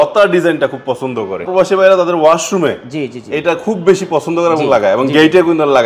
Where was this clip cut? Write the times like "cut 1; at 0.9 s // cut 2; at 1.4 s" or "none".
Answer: cut 1; at 1.5 s